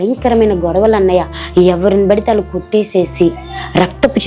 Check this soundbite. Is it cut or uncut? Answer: cut